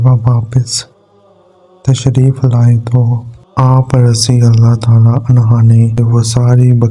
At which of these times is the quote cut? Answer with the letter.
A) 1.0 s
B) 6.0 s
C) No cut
B